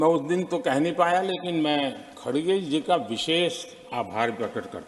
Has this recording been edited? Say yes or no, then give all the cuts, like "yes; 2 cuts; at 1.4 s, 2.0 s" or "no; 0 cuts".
no; 0 cuts